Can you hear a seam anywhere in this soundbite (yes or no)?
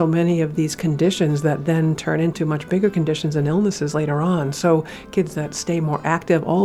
yes